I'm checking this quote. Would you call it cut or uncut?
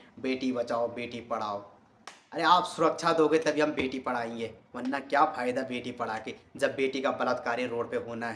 uncut